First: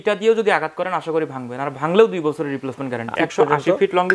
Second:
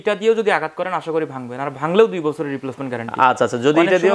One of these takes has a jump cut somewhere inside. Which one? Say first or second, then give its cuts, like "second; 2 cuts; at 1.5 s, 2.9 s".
first; 1 cut; at 3.1 s